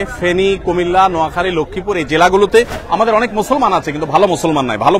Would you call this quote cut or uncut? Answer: cut